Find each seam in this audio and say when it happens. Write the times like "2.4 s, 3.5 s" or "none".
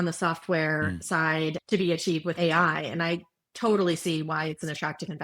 1.6 s, 2.3 s